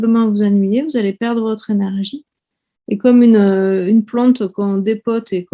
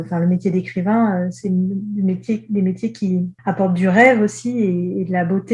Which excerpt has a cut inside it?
second; 1 cut; at 3.3 s

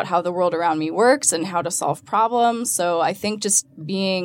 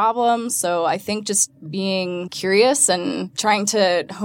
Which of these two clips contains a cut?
second; 1 cut; at 3.3 s

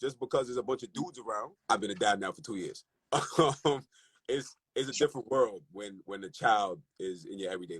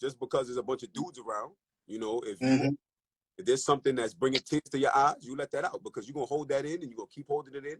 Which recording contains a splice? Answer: first; 1 cut; at 1.6 s

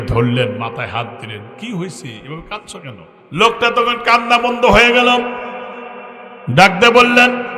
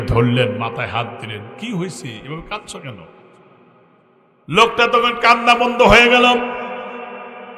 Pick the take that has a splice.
first; 1 cut; at 3.1 s

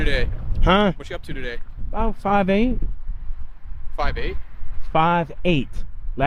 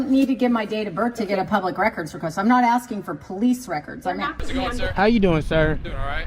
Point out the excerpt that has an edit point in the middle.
second; 1 cut; at 4.8 s

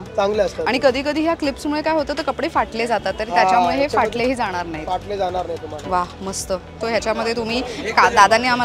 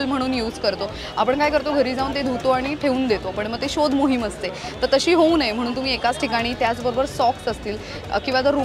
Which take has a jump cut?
first; 1 cut; at 6.8 s

